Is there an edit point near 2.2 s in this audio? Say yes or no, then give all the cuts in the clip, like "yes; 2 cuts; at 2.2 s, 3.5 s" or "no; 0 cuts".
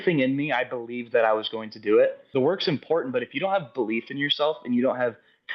yes; 1 cut; at 2.2 s